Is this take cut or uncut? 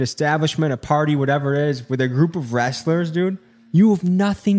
uncut